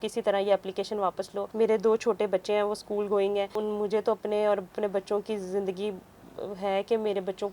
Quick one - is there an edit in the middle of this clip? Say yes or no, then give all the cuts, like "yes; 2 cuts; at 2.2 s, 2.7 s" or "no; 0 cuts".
yes; 2 cuts; at 1.4 s, 3.6 s